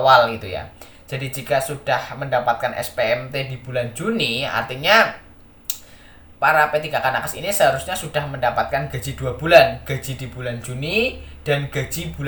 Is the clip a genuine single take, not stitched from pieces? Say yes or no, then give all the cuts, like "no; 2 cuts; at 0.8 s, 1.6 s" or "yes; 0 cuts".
yes; 0 cuts